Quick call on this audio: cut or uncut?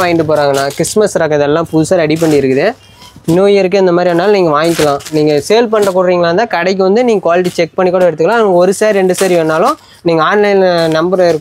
uncut